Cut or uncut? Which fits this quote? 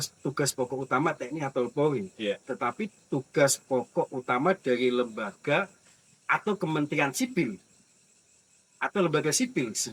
uncut